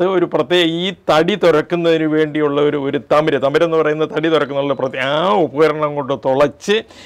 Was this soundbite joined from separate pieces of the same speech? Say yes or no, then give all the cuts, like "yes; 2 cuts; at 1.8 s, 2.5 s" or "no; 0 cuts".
no; 0 cuts